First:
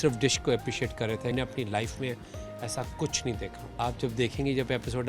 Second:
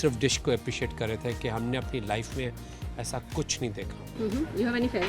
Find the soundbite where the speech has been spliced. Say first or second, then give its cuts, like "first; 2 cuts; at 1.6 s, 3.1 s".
first; 2 cuts; at 1.3 s, 3.6 s